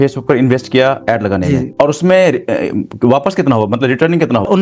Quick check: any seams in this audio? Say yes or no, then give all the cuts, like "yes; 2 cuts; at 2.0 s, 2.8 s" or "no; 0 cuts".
yes; 1 cut; at 1.7 s